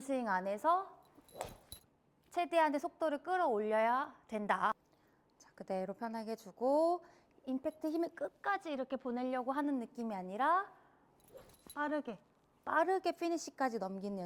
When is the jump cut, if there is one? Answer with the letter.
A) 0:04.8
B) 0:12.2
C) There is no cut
A